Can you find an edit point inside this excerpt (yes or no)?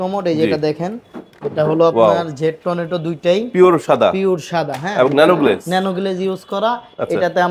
no